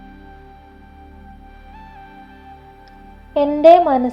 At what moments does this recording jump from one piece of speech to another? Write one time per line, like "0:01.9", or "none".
none